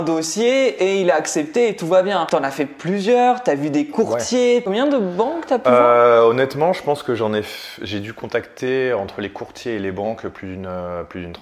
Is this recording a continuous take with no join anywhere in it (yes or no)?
no